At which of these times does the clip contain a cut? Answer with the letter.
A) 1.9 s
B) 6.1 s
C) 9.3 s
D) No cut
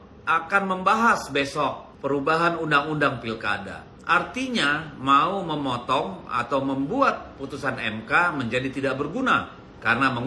A